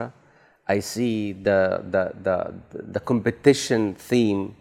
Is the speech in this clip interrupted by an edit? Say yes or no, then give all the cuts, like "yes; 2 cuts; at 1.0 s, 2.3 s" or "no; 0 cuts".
no; 0 cuts